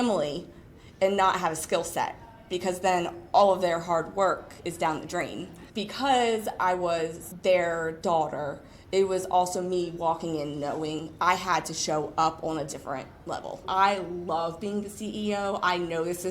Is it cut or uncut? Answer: cut